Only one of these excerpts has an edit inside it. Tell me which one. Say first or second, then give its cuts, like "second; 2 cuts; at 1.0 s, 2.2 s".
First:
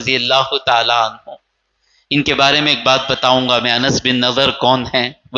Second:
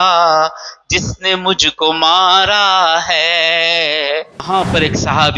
second; 1 cut; at 4.4 s